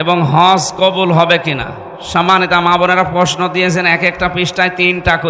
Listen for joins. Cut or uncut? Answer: uncut